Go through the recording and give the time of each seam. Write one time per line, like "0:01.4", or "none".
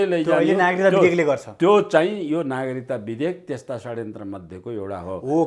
none